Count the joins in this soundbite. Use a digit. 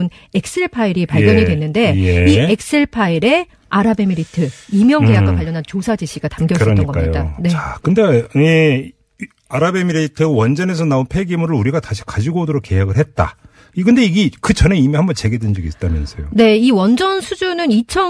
1